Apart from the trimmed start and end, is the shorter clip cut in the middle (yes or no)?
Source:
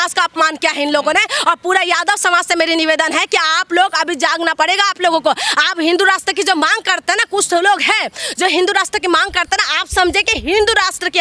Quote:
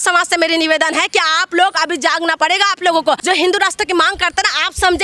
yes